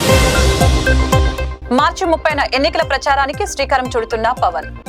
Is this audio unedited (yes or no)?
no